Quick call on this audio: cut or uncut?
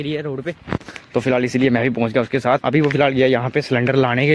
uncut